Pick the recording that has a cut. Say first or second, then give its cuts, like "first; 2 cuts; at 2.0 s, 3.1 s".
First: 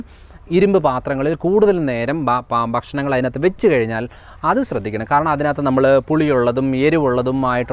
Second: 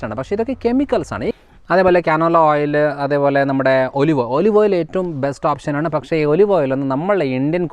second; 1 cut; at 1.3 s